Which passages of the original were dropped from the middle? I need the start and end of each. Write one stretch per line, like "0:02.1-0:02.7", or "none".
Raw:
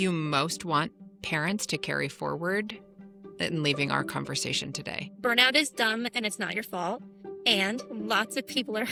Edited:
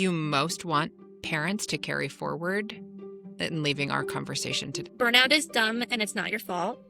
0:04.8-0:05.1